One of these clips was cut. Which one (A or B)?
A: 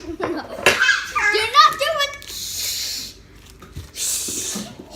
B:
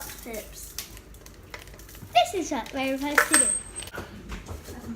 B